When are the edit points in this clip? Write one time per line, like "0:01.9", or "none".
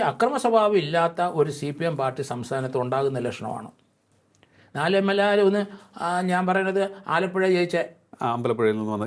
none